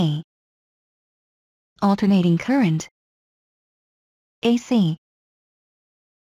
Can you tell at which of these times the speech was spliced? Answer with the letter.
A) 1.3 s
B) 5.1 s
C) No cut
C